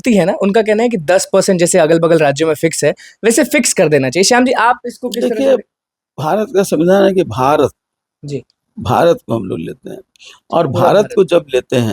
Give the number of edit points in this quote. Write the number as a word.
zero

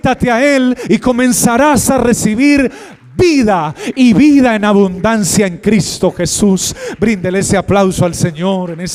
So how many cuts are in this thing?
zero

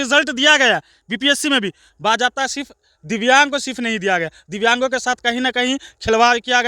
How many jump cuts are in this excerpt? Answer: zero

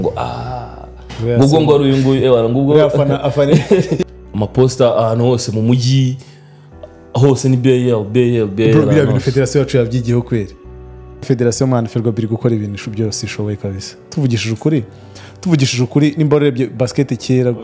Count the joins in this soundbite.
two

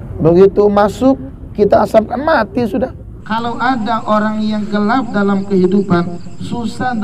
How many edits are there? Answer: one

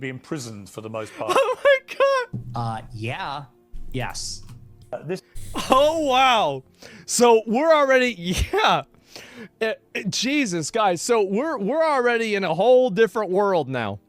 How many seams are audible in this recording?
one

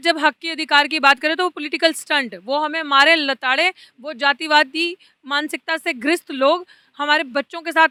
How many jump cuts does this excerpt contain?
zero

